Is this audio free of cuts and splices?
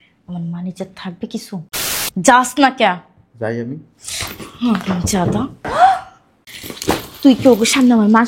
no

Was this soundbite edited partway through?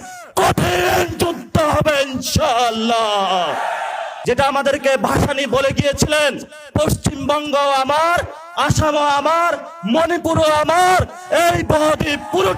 yes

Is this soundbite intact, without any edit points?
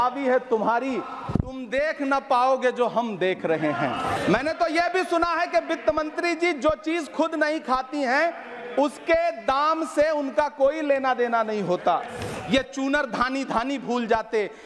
no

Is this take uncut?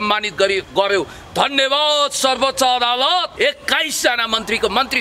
no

